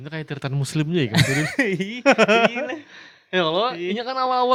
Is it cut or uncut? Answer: uncut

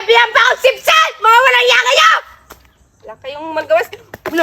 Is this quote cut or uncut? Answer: uncut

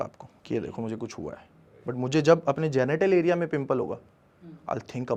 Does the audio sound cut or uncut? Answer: uncut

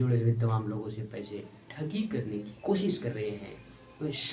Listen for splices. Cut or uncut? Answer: uncut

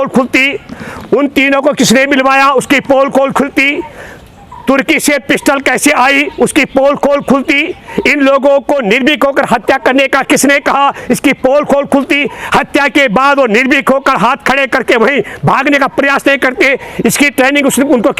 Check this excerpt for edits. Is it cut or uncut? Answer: uncut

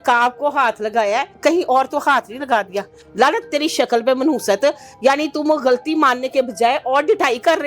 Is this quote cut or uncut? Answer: uncut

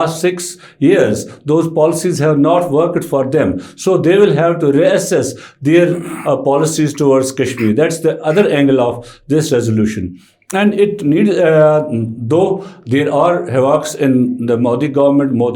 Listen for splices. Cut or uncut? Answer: uncut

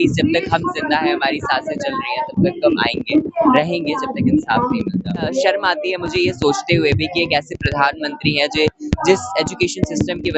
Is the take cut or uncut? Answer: cut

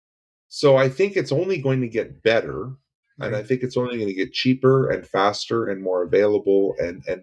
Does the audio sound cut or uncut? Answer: uncut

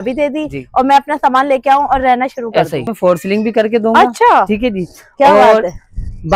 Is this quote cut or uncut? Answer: cut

